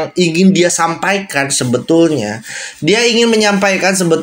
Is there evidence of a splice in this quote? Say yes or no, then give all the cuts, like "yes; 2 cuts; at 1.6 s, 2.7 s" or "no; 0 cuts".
no; 0 cuts